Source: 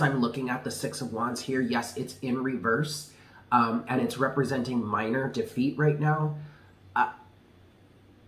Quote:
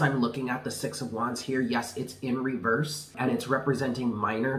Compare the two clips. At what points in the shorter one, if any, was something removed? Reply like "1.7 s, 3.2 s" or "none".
3.2 s